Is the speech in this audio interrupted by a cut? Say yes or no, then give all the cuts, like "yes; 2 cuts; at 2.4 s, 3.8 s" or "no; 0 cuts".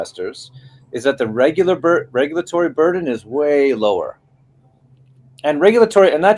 no; 0 cuts